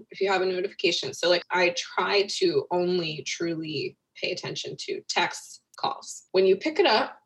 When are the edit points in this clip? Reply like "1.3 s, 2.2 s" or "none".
1.4 s, 5.9 s